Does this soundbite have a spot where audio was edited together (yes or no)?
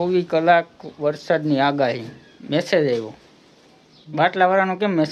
no